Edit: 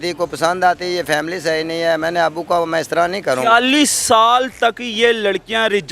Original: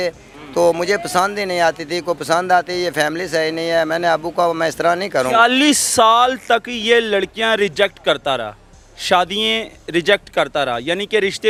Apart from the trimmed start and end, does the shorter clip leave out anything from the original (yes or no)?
no